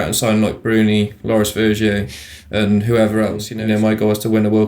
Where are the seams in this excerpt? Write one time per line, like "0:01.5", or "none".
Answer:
0:03.5